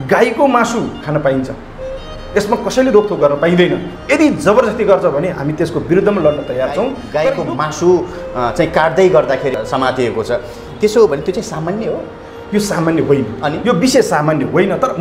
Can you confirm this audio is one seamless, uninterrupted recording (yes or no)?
no